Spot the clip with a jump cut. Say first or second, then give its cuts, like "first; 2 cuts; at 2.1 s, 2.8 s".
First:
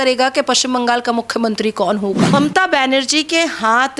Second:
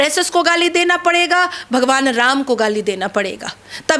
first; 1 cut; at 2.3 s